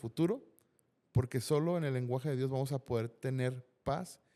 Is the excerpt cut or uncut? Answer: uncut